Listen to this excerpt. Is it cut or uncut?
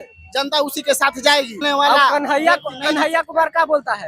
cut